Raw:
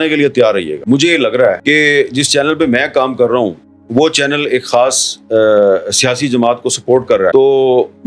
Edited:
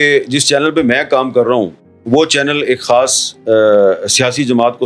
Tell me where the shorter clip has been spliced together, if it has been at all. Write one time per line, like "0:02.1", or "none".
none

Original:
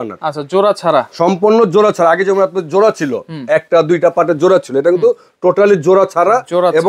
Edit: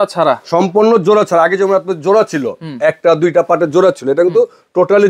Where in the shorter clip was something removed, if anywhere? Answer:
none

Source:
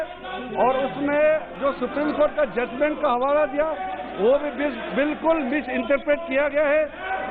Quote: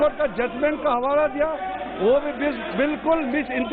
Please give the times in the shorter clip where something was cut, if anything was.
none

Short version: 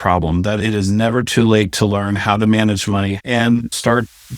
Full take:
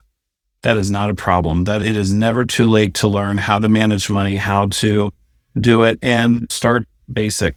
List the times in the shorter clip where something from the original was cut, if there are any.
0:03.2

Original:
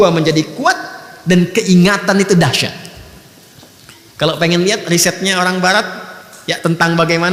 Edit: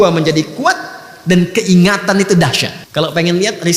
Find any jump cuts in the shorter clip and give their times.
0:02.7

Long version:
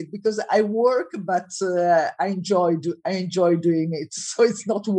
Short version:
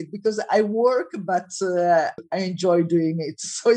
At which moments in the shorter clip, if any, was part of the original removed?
0:02.2

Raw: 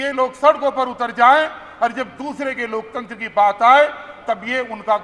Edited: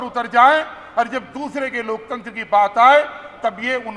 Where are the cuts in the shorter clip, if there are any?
none

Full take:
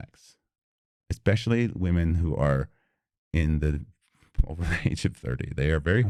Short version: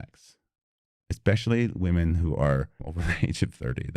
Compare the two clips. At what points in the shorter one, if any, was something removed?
0:02.8

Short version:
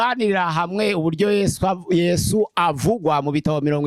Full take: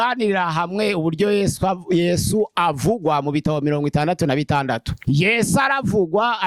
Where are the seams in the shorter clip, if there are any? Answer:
none

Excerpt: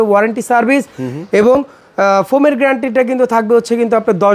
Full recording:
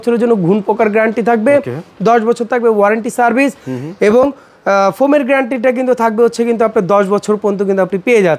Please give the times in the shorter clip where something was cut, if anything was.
none

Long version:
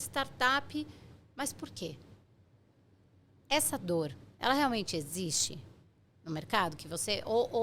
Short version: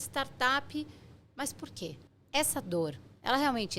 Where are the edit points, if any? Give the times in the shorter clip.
0:02.1

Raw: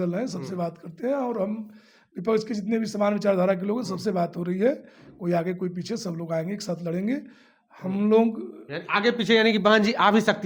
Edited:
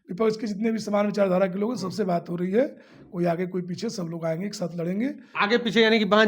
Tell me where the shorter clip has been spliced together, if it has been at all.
0:05.2

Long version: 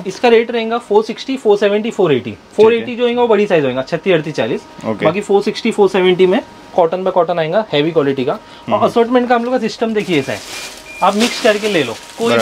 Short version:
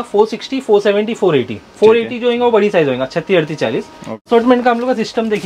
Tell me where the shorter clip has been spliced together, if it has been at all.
0:04.2

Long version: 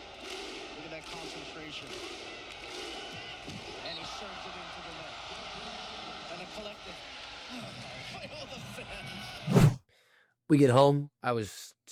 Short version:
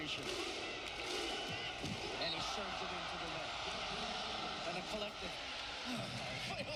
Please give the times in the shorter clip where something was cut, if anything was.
none

